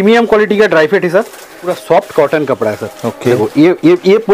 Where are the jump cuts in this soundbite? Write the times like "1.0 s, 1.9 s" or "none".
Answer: 1.7 s